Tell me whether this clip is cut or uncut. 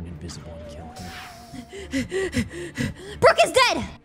cut